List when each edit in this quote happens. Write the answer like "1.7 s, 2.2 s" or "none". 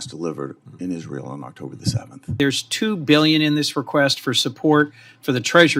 2.3 s